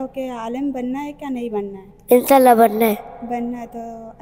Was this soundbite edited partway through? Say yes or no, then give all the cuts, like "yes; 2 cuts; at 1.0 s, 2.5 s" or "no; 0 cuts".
yes; 1 cut; at 1.9 s